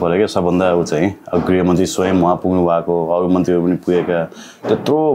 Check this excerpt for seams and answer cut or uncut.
uncut